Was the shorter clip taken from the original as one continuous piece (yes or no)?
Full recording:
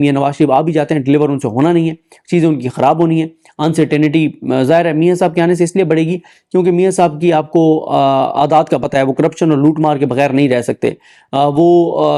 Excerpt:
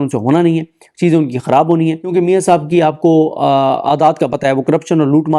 no